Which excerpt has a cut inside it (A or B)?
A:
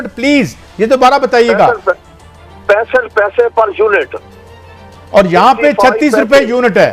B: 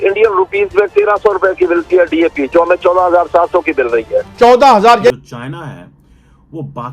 B